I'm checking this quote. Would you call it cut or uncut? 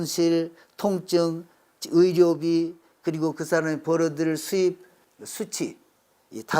cut